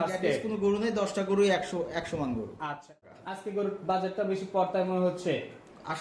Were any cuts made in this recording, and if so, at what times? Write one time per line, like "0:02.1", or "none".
0:02.9